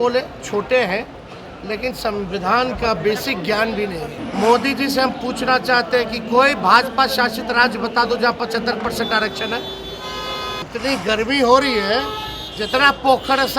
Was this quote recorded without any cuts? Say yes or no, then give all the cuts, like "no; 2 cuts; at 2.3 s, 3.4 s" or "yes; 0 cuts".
no; 2 cuts; at 4.2 s, 10.6 s